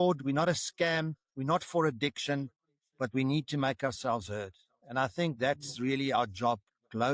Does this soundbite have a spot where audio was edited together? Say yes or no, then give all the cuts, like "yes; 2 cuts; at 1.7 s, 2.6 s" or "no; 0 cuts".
no; 0 cuts